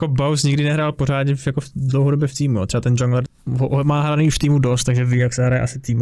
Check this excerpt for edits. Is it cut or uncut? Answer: uncut